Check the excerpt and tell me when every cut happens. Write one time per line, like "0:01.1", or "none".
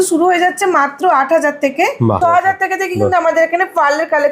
0:02.2